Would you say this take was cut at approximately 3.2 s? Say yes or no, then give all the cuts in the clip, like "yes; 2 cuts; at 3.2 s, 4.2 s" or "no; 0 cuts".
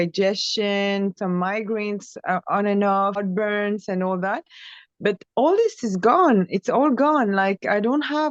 yes; 1 cut; at 3.2 s